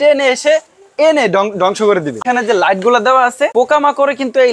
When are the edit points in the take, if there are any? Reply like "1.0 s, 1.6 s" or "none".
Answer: 2.2 s, 3.5 s